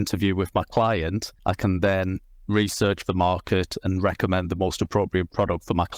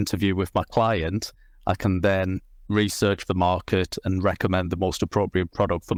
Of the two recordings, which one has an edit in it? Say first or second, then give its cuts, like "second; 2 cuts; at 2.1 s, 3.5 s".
first; 1 cut; at 1.3 s